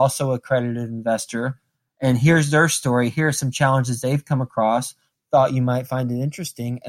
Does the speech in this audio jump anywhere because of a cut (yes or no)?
no